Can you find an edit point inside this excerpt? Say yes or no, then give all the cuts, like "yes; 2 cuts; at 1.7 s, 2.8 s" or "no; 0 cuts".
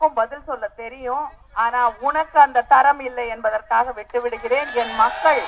no; 0 cuts